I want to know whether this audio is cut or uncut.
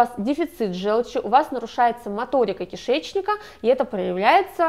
uncut